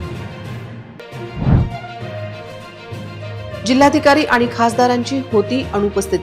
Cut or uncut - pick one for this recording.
cut